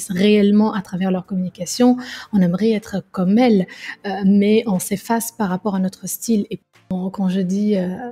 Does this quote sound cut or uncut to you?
cut